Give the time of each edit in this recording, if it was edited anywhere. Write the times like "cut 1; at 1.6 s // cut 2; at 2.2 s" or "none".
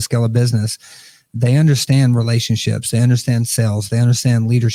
none